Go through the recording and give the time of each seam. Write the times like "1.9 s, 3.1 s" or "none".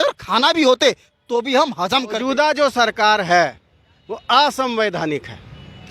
2.2 s